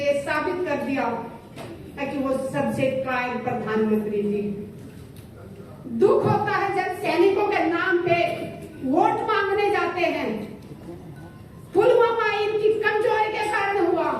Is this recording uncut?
yes; 0 cuts

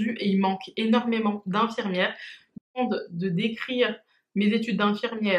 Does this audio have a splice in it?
yes; 1 cut; at 2.7 s

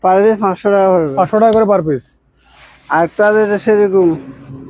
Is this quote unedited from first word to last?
yes; 0 cuts

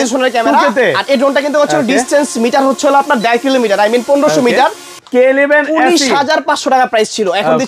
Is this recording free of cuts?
no; 1 cut; at 4.9 s

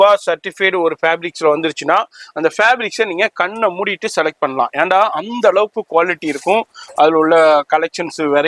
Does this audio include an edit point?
no; 0 cuts

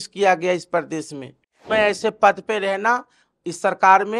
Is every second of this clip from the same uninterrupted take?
no; 1 cut; at 1.7 s

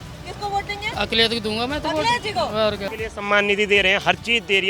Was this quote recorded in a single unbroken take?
no; 1 cut; at 2.9 s

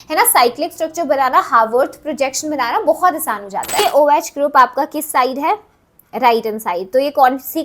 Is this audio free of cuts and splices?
no; 1 cut; at 3.8 s

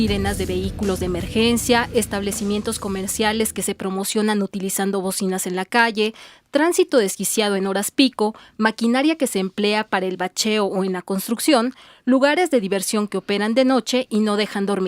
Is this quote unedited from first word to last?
no; 1 cut; at 12.6 s

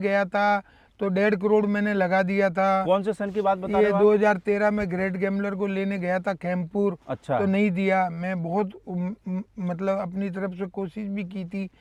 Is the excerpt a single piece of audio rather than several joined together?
yes; 0 cuts

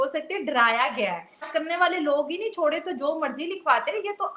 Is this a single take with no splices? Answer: no; 1 cut; at 1.5 s

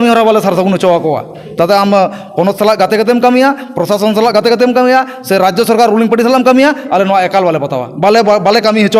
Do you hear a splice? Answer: no; 0 cuts

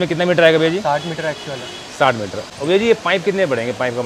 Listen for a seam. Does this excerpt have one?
yes; 1 cut; at 2.5 s

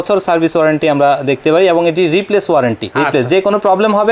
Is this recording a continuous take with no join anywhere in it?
no; 1 cut; at 2.9 s

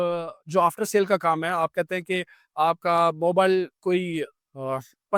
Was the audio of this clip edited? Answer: no; 0 cuts

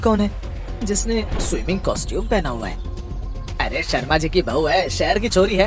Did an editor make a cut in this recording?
no; 0 cuts

